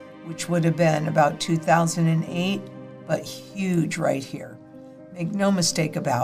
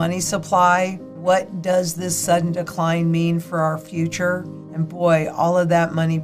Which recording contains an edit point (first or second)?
second